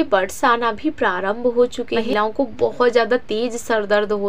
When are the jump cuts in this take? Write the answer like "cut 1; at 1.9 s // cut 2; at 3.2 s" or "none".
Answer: cut 1; at 2.1 s